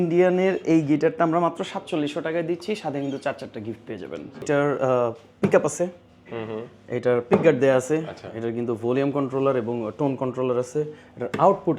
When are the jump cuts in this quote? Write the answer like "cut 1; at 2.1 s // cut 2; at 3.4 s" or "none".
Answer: cut 1; at 4.4 s